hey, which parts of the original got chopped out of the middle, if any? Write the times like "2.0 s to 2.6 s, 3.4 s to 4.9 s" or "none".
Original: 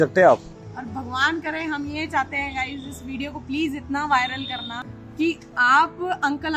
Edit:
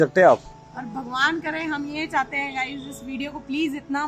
none